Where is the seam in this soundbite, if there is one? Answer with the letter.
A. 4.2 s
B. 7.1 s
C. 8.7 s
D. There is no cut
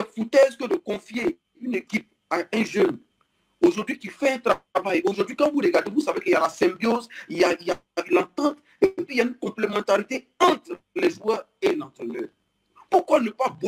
D